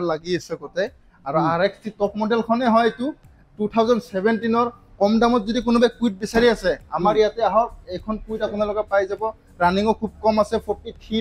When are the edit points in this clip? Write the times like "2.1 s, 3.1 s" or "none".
none